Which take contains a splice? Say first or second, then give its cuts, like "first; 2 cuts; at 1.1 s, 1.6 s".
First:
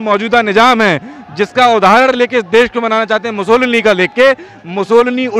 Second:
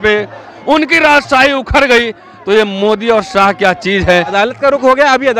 second; 1 cut; at 4.3 s